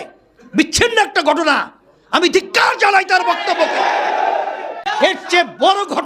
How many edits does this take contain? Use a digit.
1